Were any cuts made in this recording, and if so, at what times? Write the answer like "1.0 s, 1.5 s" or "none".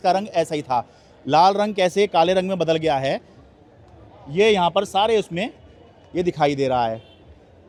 none